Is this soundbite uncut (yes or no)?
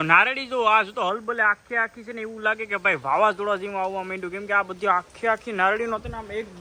yes